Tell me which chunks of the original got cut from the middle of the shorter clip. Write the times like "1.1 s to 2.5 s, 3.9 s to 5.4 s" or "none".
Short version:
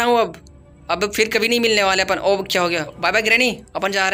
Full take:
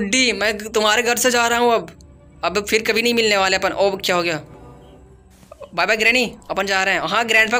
4.4 s to 5.7 s